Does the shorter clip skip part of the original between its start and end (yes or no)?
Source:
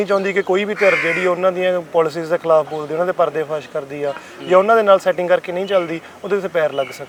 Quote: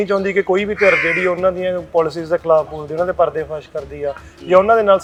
no